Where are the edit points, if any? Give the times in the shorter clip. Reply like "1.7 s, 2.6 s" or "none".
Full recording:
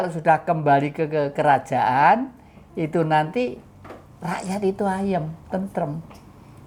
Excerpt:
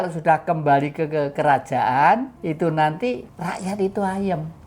2.3 s, 3.3 s

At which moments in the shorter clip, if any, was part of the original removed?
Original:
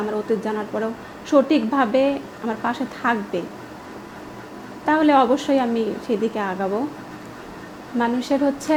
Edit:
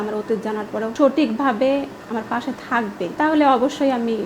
0.9 s, 3.1 s

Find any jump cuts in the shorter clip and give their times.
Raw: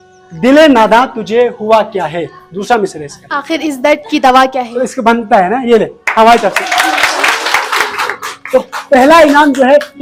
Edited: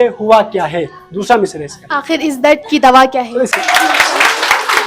3.5 s

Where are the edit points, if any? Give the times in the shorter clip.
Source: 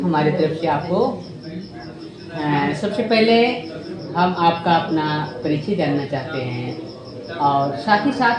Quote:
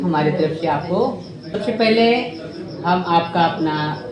1.5 s

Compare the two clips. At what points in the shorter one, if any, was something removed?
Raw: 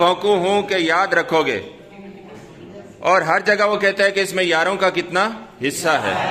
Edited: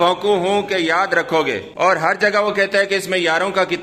1.7 s

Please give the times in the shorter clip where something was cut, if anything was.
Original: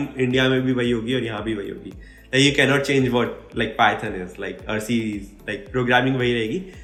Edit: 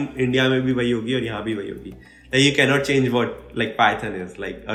none

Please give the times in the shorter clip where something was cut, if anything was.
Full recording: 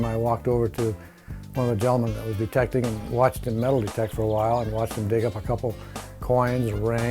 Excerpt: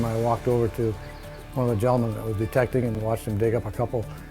3.0 s

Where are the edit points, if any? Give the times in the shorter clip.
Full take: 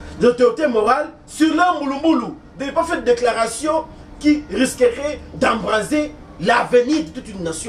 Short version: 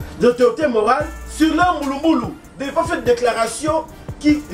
none

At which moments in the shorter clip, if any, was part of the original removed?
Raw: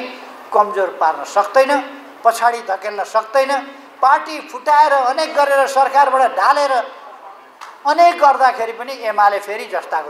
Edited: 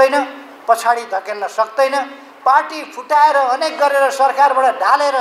none

